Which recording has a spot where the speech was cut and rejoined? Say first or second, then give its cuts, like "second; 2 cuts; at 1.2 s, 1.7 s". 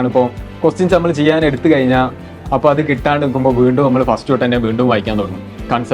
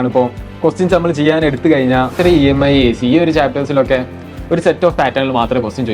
second; 1 cut; at 2.2 s